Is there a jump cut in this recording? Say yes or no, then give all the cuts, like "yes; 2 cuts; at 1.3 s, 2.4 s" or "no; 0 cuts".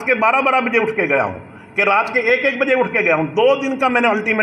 no; 0 cuts